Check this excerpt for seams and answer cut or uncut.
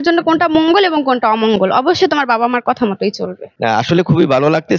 cut